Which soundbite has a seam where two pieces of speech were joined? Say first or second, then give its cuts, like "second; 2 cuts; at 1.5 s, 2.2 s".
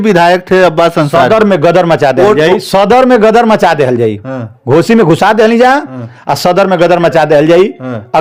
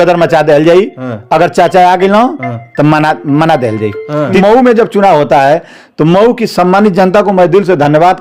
second; 1 cut; at 4.4 s